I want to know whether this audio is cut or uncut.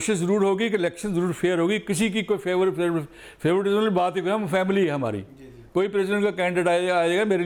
uncut